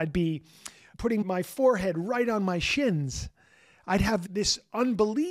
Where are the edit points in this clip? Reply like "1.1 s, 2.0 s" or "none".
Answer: 1.2 s, 4.2 s